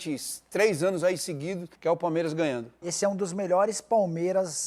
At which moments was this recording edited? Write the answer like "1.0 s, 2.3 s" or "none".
1.7 s, 2.8 s